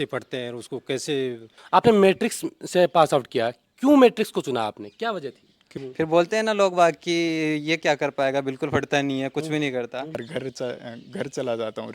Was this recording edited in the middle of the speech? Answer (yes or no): yes